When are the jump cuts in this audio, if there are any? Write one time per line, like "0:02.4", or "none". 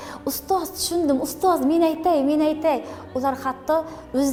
none